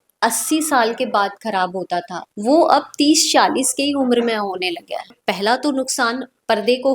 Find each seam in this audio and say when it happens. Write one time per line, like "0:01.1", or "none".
0:02.2
0:05.1